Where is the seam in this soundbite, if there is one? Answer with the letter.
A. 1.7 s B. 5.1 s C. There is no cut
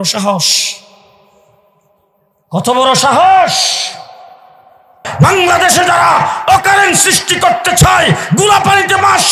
B